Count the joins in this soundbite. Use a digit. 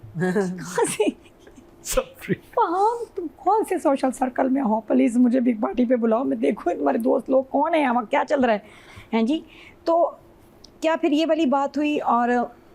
0